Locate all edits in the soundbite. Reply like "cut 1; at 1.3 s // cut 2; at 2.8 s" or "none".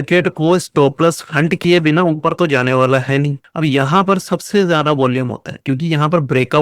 cut 1; at 3.4 s